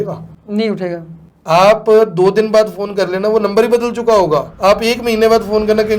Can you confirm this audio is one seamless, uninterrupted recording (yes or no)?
no